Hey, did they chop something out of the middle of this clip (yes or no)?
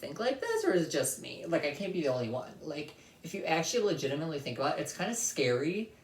no